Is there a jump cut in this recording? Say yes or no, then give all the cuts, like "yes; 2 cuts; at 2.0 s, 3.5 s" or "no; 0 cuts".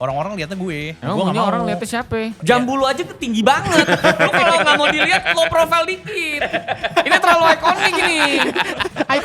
yes; 2 cuts; at 0.9 s, 2.4 s